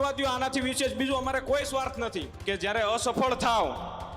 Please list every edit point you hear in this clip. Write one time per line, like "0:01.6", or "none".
0:02.3